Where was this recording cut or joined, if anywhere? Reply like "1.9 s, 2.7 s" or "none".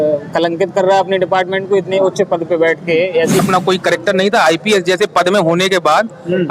3.4 s